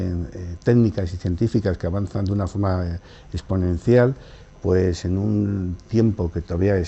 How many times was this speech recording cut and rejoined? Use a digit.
1